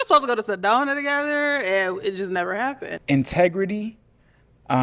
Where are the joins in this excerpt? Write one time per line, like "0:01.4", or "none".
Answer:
0:02.9

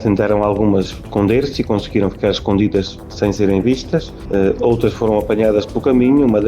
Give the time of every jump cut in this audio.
0:01.0
0:03.0
0:04.2

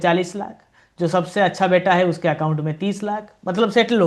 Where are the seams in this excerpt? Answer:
none

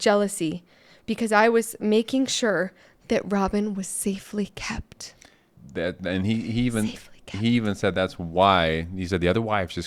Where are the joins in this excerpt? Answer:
0:05.6

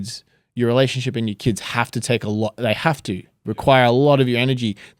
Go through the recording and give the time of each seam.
none

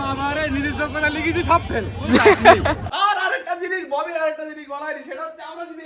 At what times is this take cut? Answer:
0:02.9

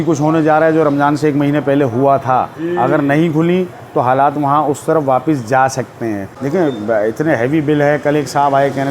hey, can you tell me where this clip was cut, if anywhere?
0:06.3

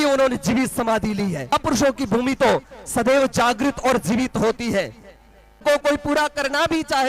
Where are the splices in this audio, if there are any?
0:01.5
0:05.6

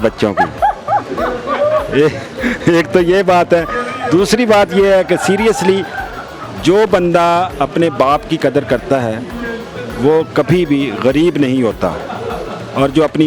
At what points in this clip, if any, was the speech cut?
none

